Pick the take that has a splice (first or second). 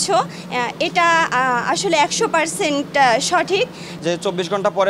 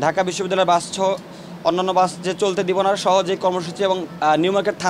first